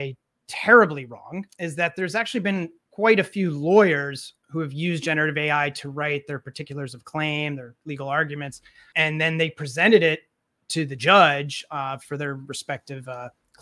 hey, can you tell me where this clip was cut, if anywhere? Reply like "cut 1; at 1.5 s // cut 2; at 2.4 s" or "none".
cut 1; at 1.5 s // cut 2; at 2.8 s // cut 3; at 8.8 s